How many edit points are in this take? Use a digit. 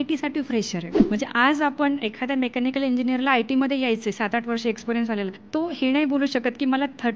2